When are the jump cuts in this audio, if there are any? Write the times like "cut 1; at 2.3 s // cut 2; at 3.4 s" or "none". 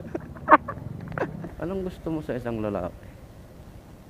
cut 1; at 1.4 s